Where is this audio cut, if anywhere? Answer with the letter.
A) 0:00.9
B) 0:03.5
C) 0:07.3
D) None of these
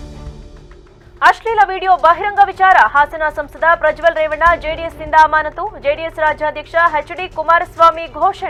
D